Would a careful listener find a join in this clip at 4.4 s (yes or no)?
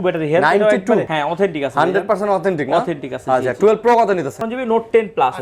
yes